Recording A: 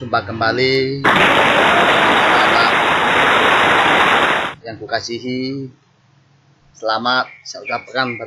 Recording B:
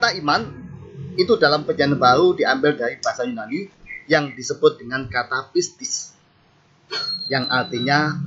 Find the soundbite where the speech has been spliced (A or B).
A